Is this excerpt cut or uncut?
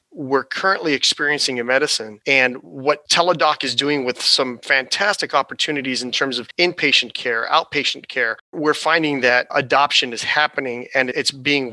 uncut